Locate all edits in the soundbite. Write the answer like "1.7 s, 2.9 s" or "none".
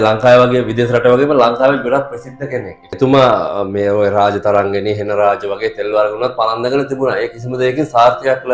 2.9 s